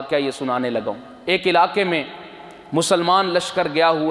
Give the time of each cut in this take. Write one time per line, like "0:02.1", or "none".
0:01.1

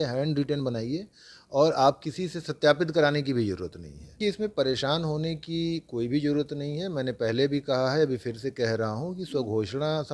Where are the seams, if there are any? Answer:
0:04.2

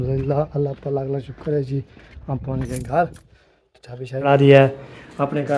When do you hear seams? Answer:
0:04.3

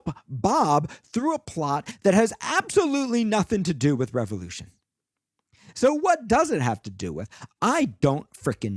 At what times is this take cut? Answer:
none

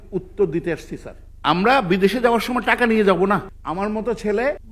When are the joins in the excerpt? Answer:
0:01.3
0:03.5

